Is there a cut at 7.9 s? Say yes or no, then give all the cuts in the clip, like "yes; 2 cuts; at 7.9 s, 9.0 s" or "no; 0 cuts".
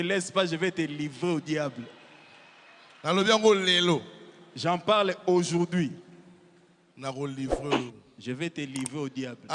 no; 0 cuts